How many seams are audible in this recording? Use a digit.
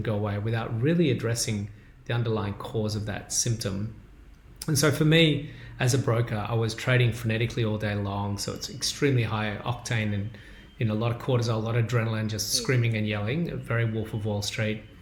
0